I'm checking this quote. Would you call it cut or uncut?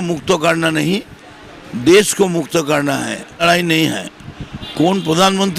cut